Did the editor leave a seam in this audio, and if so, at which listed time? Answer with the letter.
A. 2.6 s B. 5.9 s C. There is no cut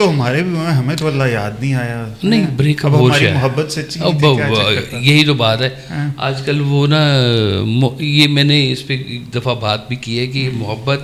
C